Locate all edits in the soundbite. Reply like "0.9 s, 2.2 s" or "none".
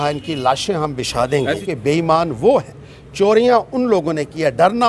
1.6 s